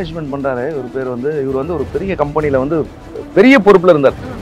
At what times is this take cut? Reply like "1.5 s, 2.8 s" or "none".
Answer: none